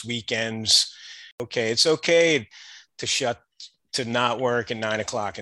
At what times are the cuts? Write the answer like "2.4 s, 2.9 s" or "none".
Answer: 1.4 s